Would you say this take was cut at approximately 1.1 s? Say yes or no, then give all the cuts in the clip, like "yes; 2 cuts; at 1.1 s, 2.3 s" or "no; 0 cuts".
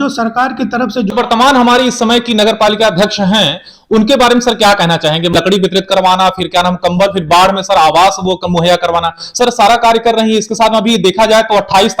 yes; 2 cuts; at 1.1 s, 5.3 s